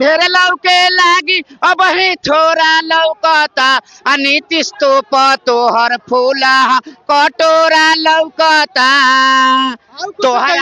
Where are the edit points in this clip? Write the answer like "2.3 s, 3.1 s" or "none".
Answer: none